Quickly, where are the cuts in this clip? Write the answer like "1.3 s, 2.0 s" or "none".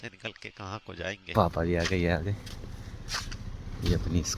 1.2 s